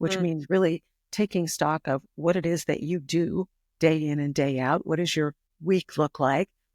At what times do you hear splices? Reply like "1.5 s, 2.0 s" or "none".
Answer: 5.5 s